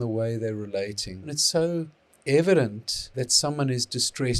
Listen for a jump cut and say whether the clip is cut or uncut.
cut